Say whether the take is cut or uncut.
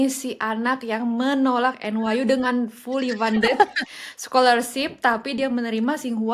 uncut